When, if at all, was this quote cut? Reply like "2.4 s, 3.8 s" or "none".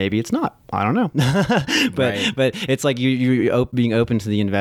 none